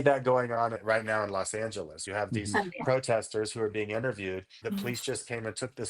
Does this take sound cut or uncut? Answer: cut